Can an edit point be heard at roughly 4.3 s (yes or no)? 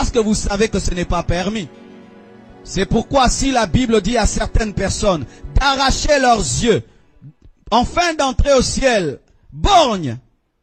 no